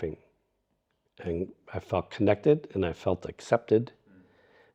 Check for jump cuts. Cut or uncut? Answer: uncut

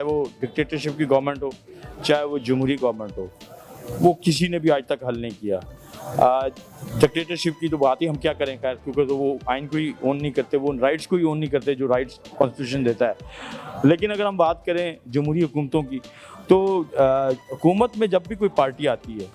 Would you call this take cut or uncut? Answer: uncut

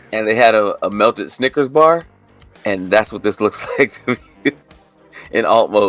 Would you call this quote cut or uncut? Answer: uncut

